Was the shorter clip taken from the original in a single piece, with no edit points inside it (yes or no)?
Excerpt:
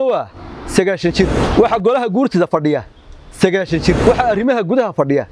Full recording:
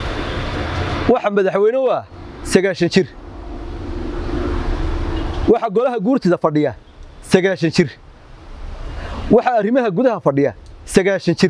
no